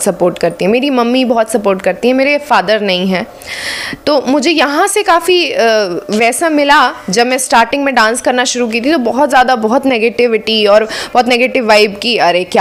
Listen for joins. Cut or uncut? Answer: uncut